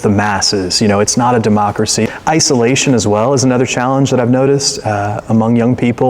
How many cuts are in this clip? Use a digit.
1